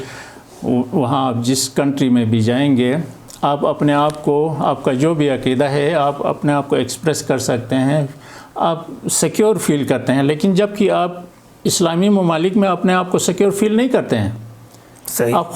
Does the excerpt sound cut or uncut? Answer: uncut